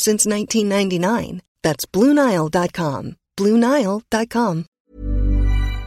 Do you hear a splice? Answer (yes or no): yes